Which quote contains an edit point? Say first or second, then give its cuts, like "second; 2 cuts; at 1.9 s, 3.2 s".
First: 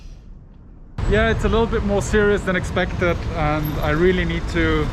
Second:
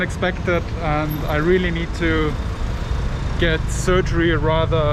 first; 1 cut; at 0.9 s